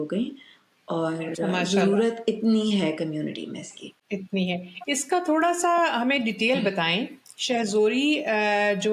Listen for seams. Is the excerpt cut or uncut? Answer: uncut